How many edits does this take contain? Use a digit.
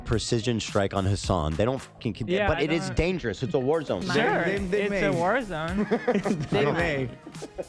1